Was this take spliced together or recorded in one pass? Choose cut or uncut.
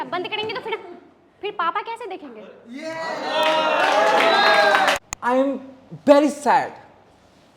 cut